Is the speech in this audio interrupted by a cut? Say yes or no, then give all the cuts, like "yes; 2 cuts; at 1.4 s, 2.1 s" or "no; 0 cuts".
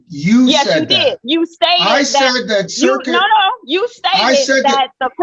no; 0 cuts